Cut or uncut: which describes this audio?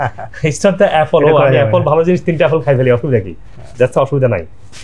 uncut